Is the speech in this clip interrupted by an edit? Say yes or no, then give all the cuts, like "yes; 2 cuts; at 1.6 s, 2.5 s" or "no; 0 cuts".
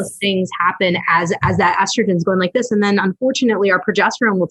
no; 0 cuts